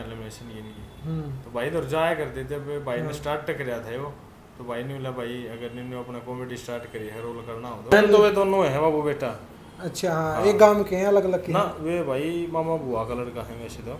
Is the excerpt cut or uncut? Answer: cut